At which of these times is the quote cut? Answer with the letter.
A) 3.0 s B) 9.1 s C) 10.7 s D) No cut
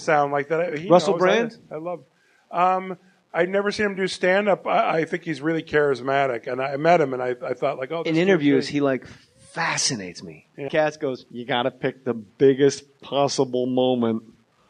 D